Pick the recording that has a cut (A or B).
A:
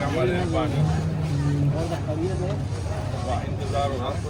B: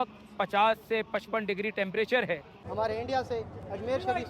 B